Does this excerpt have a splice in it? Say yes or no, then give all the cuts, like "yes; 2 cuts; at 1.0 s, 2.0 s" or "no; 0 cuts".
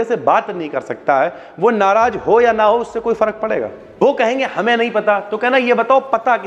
yes; 1 cut; at 3.8 s